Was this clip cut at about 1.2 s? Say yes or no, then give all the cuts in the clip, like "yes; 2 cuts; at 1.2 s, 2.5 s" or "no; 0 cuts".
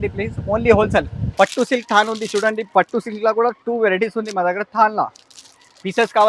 yes; 1 cut; at 1.2 s